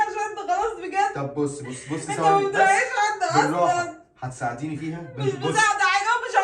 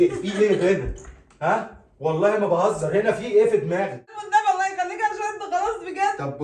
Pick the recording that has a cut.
second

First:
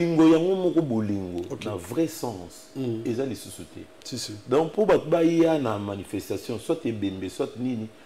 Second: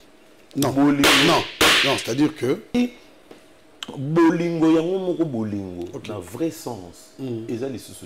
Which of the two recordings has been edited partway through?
second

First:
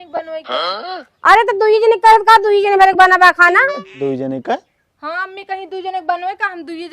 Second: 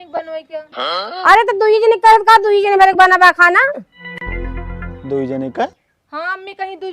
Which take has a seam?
first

